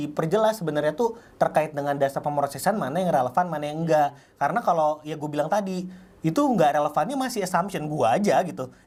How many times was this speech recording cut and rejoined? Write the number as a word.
zero